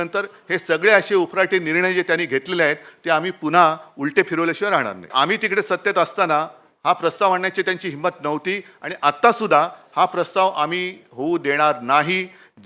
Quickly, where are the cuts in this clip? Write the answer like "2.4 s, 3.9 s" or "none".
5.1 s